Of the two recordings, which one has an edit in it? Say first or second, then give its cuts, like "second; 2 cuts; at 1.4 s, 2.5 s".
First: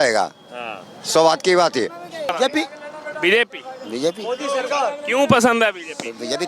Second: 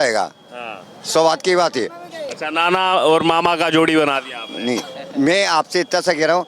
first; 1 cut; at 2.3 s